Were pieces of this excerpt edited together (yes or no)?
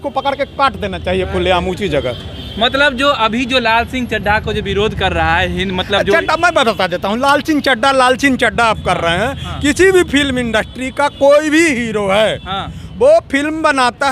no